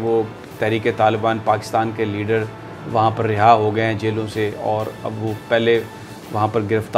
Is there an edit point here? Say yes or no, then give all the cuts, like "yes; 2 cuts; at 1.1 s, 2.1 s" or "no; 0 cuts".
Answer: no; 0 cuts